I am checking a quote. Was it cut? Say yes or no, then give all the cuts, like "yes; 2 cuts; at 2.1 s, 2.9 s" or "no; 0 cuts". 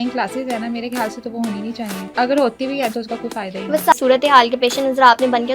yes; 2 cuts; at 2.1 s, 3.9 s